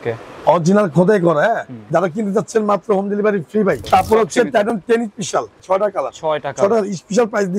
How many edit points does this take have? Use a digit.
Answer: 3